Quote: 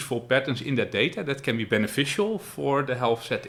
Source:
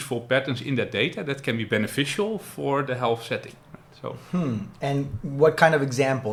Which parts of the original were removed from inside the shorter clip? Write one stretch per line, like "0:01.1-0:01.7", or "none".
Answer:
none